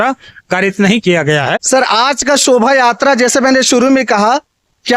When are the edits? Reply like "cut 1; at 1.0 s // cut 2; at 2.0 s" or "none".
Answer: cut 1; at 1.5 s